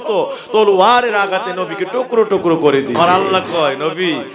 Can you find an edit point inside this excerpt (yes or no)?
yes